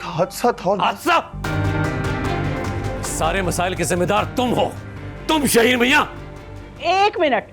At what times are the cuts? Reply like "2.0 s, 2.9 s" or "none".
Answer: 3.1 s

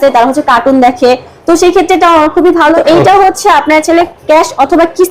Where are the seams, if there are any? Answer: 2.8 s

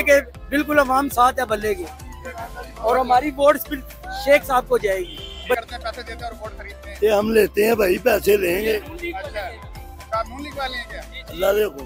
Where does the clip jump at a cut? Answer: 5.6 s

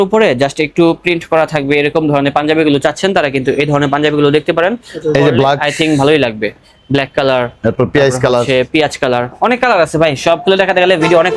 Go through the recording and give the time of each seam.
none

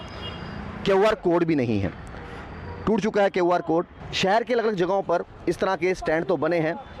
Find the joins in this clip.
4.0 s

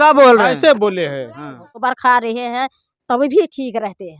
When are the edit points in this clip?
1.8 s

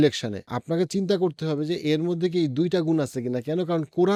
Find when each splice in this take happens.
none

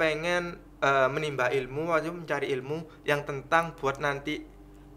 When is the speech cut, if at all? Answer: none

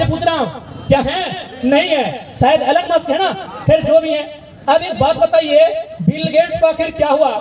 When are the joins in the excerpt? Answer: none

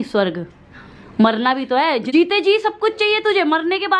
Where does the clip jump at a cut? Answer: 2.1 s

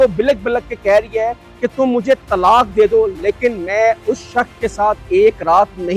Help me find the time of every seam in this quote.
none

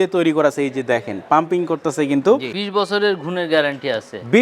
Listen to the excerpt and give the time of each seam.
2.4 s

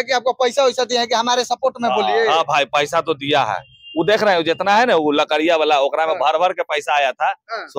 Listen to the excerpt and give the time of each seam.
none

